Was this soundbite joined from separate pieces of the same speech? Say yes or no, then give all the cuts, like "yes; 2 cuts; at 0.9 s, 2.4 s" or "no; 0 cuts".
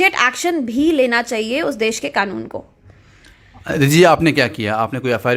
no; 0 cuts